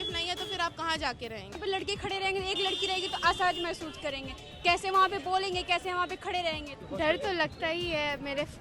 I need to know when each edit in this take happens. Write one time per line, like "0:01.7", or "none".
0:01.6
0:06.7